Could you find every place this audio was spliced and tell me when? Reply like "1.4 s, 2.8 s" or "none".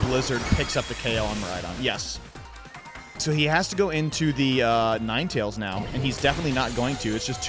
3.2 s